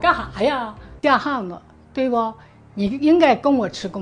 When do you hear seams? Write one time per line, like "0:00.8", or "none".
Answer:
0:00.9